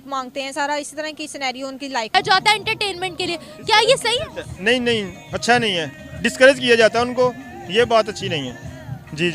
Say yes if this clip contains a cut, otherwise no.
yes